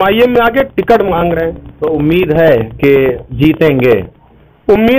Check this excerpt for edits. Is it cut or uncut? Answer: uncut